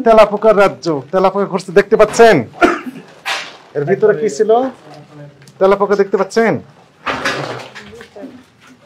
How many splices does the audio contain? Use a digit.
0